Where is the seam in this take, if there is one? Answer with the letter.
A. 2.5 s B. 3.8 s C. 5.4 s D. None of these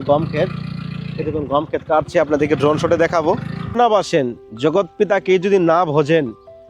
B